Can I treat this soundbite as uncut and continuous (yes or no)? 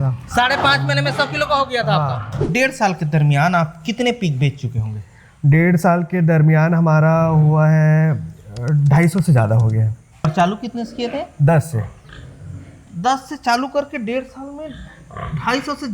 no